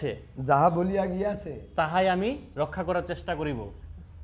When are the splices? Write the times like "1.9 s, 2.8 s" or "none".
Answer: none